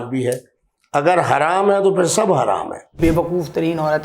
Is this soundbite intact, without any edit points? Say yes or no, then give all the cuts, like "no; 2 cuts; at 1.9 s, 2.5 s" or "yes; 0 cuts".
no; 1 cut; at 2.9 s